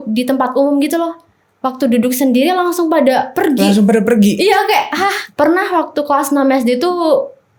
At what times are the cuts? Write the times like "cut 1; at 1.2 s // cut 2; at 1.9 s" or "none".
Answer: cut 1; at 5.2 s